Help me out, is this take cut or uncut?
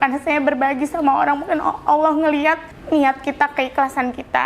cut